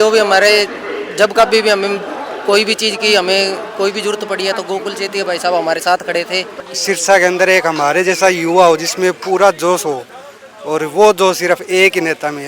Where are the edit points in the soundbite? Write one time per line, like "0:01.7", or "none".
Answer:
0:06.6